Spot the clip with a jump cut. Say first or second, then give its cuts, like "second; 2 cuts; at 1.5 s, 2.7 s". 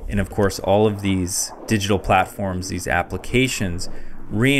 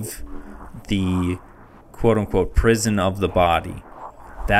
first; 1 cut; at 1.5 s